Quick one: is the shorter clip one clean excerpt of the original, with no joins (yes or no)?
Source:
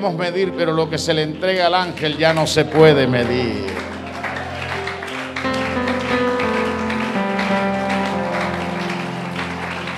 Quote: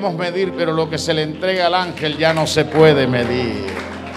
yes